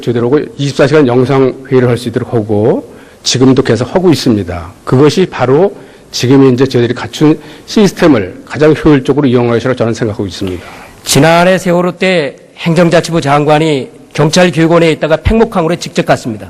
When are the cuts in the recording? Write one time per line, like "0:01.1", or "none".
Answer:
0:05.1